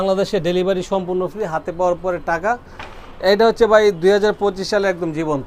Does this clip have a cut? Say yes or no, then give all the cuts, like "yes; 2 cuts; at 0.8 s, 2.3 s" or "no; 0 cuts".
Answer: no; 0 cuts